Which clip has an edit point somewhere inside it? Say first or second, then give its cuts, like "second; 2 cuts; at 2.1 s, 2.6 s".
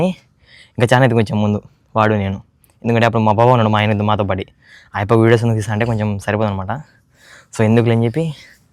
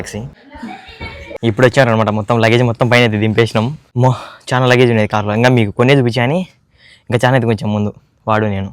second; 2 cuts; at 1.3 s, 3.8 s